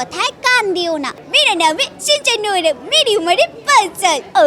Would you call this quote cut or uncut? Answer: cut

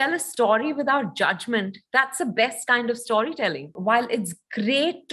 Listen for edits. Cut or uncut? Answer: cut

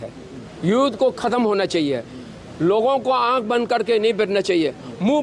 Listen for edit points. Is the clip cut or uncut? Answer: uncut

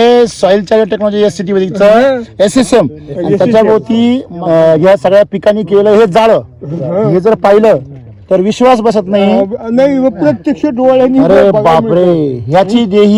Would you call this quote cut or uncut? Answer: uncut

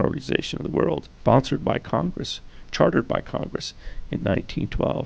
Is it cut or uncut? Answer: cut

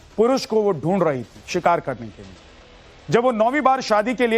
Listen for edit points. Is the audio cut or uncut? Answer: cut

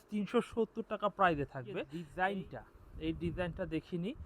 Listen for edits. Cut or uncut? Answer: cut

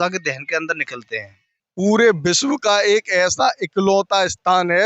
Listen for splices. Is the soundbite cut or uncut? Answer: cut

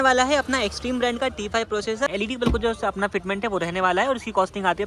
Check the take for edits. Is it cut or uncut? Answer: cut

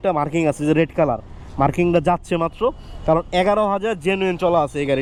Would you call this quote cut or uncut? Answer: uncut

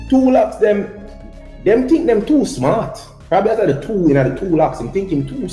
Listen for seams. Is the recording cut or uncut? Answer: uncut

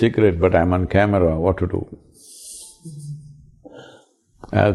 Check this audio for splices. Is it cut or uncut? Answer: uncut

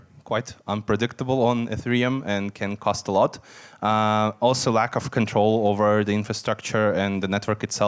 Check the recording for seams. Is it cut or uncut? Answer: uncut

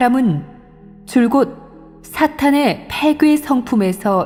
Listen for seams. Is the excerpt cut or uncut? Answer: uncut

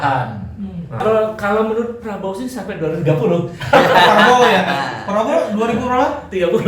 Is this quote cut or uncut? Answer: cut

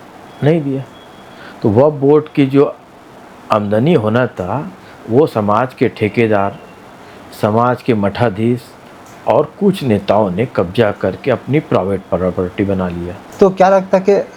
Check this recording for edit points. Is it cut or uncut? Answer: cut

